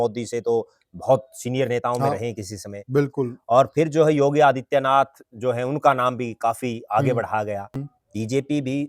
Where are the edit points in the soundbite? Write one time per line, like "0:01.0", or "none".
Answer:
0:07.7